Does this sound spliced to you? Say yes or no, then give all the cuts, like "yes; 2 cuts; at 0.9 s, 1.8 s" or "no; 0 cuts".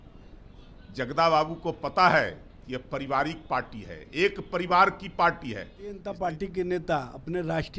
yes; 1 cut; at 6.1 s